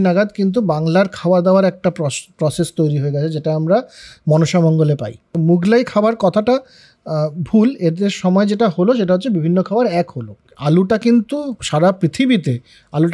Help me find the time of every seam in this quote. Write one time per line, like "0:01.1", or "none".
0:05.2
0:10.3